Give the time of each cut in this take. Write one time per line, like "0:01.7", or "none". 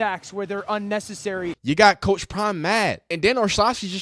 0:01.6
0:03.1

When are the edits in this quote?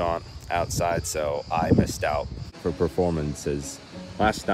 0:02.4

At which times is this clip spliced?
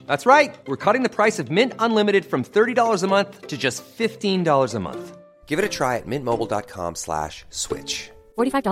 none

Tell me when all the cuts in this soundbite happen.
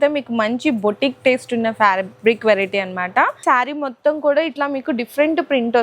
0:03.4

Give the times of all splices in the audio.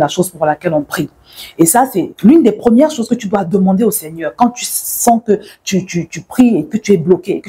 none

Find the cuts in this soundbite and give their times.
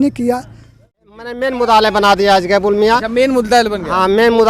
0:01.0

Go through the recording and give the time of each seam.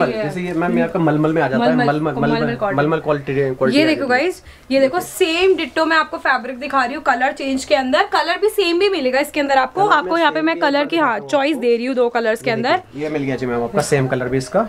none

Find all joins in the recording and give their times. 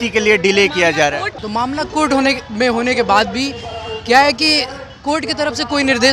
0:01.3

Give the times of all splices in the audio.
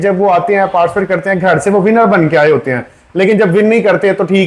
none

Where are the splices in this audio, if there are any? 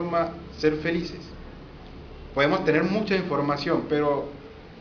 0:02.9

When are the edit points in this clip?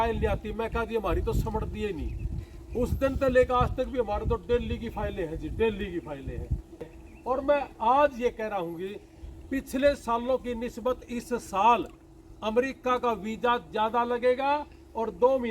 0:06.9

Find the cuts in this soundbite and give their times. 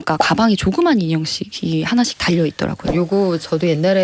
0:02.9

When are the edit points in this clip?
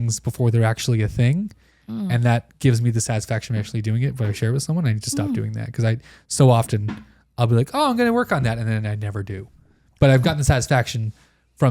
0:10.2

